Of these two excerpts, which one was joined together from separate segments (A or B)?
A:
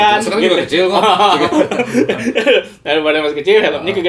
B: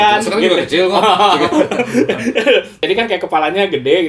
B